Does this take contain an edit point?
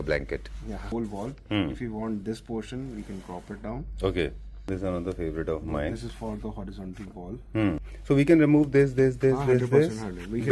yes; 3 cuts; at 0.9 s, 4.7 s, 7.8 s

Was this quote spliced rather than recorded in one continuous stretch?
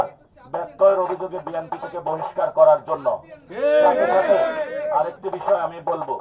no; 0 cuts

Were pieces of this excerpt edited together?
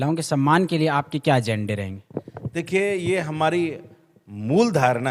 no; 0 cuts

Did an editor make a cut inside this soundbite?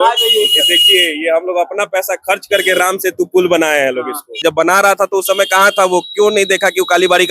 yes; 1 cut; at 4.5 s

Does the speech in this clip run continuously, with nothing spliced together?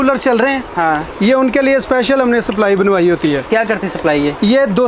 yes; 0 cuts

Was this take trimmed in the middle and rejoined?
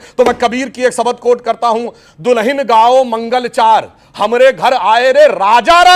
no; 0 cuts

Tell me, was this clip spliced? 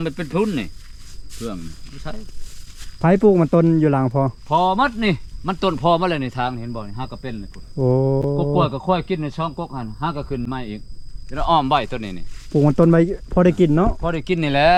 no; 0 cuts

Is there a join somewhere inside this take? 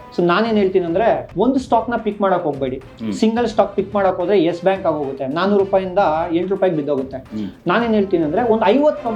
yes; 1 cut; at 1.3 s

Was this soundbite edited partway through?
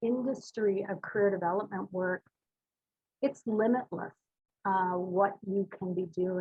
no; 0 cuts

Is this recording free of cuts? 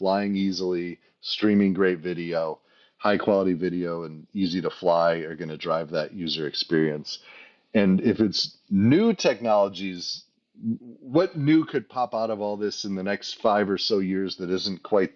no; 1 cut; at 10.8 s

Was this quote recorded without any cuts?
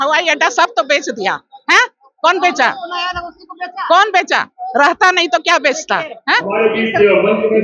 yes; 0 cuts

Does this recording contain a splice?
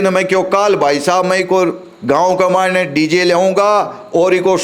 no; 0 cuts

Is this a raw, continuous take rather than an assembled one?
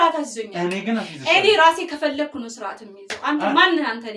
yes; 0 cuts

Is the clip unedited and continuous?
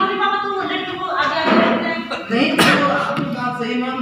yes; 0 cuts

